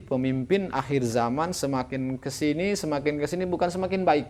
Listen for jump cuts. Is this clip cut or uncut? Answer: uncut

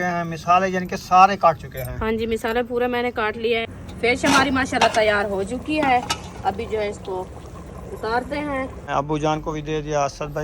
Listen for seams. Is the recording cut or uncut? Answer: cut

